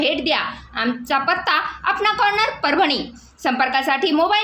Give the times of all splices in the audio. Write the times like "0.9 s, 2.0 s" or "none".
2.5 s